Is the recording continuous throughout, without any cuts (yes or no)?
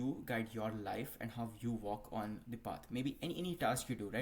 yes